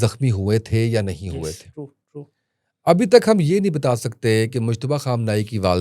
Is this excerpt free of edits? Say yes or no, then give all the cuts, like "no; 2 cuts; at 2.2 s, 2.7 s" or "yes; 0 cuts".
yes; 0 cuts